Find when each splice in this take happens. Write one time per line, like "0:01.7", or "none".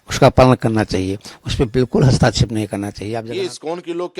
0:03.1